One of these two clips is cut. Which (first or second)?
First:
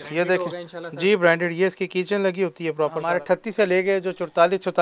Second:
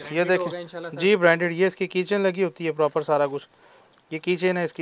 first